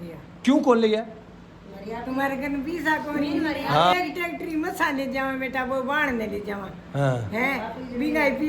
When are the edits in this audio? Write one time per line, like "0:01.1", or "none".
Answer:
0:03.9